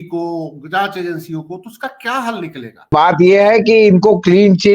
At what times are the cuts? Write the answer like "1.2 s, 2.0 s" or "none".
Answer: 2.9 s

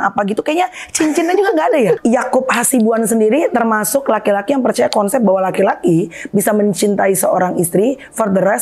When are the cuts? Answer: 2.0 s

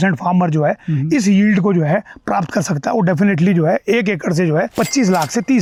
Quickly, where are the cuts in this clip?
none

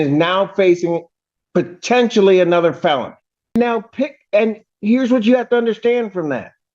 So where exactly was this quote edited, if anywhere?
3.6 s

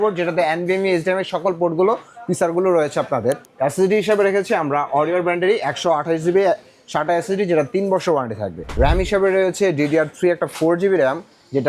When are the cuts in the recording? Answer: 3.5 s, 8.6 s

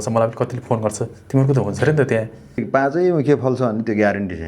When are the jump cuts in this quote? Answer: 2.6 s

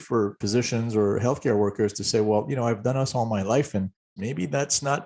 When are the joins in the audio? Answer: 4.0 s

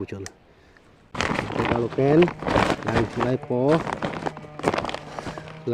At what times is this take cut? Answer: 1.2 s

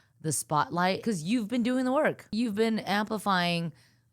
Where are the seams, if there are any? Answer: 1.0 s, 2.3 s

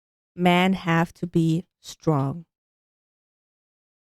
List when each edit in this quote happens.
none

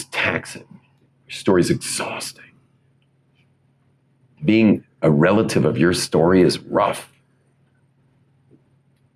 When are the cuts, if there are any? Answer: none

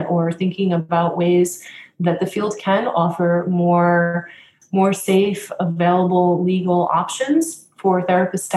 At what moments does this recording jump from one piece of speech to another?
none

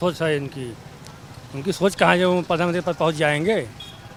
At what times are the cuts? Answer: none

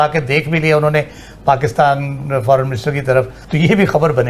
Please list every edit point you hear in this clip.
3.4 s

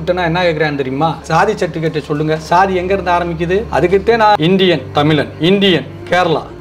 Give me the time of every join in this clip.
1.2 s, 4.4 s

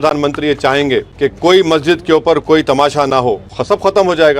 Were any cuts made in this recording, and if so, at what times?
1.1 s, 3.5 s

